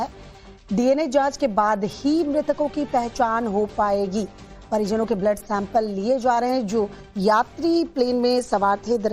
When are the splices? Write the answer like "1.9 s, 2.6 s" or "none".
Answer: 3.7 s